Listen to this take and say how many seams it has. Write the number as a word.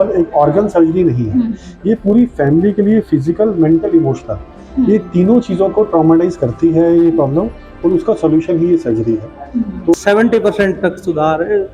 one